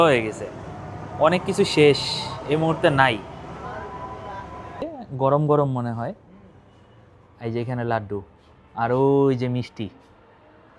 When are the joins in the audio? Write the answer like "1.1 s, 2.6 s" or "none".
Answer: 4.7 s